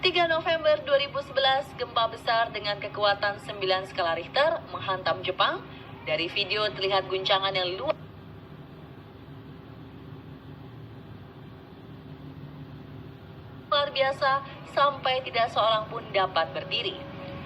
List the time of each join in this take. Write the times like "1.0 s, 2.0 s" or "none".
none